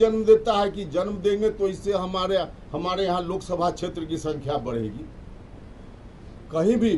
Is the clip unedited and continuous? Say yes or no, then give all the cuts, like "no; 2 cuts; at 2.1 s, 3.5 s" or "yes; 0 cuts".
yes; 0 cuts